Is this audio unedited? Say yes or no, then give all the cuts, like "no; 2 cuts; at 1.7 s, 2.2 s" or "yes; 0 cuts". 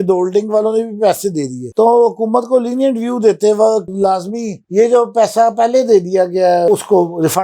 no; 2 cuts; at 3.9 s, 6.7 s